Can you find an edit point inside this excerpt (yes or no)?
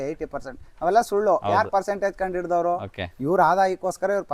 no